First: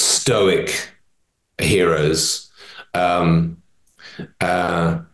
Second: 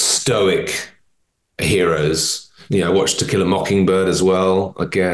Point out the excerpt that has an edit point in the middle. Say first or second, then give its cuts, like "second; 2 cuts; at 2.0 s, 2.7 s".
second; 1 cut; at 2.6 s